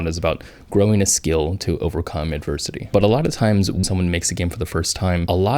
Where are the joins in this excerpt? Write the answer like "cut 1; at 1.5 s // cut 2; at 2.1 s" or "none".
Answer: cut 1; at 3.8 s